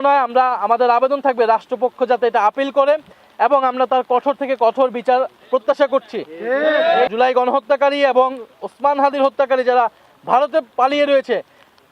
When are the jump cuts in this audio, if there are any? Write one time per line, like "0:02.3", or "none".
0:07.1